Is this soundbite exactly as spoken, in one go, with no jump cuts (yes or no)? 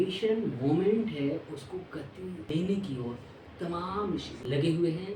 no